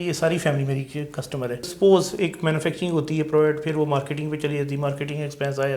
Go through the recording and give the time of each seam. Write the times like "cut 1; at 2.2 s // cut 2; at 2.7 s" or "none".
cut 1; at 1.7 s